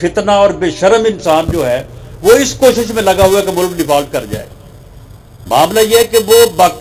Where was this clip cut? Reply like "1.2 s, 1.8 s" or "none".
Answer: none

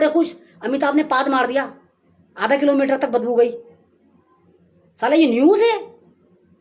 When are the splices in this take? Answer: none

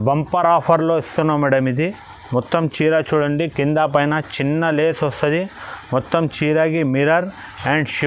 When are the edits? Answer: none

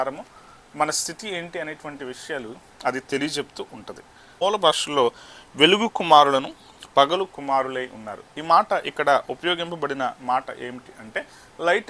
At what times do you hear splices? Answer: 4.2 s

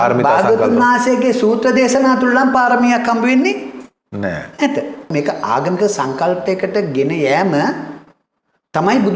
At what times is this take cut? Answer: 5.1 s

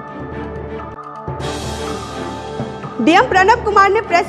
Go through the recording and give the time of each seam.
none

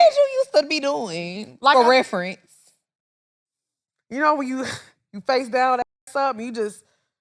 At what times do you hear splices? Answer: none

